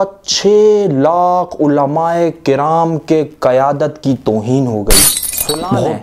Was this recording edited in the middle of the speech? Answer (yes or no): no